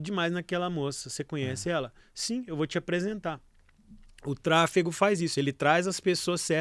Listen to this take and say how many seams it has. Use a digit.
0